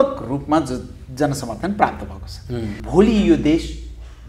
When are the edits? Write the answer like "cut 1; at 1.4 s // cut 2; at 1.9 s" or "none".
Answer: cut 1; at 2.8 s